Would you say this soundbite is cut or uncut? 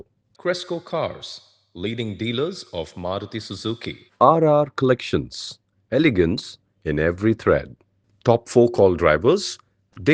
uncut